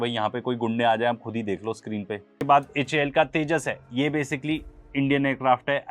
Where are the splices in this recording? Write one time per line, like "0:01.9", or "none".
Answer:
0:02.4